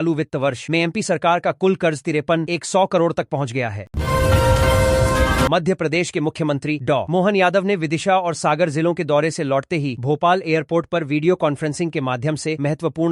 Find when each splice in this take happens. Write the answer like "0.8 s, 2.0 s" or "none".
3.9 s, 5.5 s